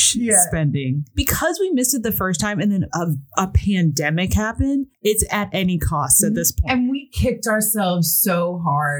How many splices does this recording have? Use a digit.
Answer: 2